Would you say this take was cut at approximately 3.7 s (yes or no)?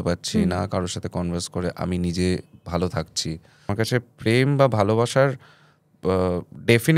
yes